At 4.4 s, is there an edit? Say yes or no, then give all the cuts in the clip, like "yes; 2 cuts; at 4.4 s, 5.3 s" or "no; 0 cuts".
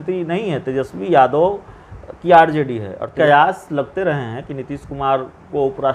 no; 1 cut; at 3.1 s